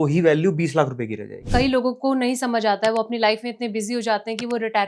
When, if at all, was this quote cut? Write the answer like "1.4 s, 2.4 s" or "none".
1.5 s